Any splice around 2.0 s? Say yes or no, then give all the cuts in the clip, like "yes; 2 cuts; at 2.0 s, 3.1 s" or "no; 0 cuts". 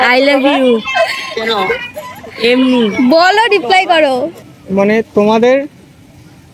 no; 1 cut; at 4.3 s